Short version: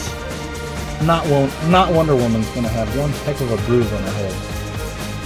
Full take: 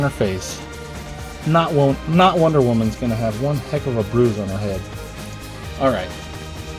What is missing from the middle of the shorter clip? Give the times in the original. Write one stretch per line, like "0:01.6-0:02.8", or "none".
none